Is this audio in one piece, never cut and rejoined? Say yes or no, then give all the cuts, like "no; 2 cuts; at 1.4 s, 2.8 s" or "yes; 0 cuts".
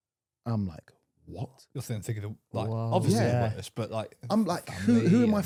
yes; 0 cuts